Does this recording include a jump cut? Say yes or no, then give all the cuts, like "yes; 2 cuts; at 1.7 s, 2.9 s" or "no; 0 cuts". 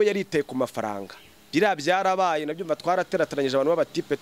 no; 0 cuts